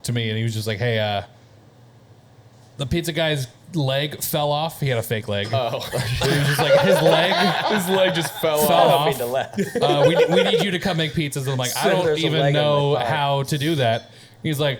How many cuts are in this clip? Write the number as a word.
zero